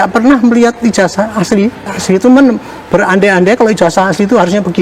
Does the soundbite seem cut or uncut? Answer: cut